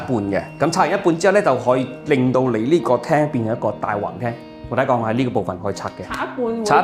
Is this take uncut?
yes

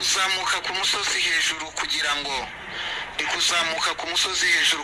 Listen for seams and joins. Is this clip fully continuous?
yes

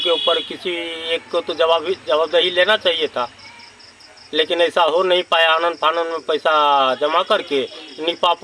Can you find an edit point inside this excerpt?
no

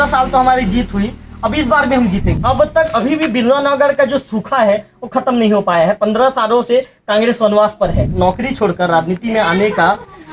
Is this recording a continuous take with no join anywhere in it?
no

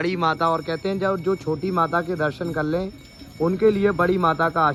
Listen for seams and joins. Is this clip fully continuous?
yes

